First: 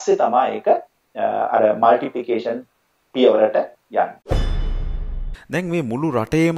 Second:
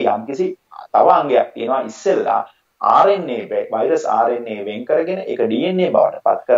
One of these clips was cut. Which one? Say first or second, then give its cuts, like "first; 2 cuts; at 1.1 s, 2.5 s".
first; 1 cut; at 4.4 s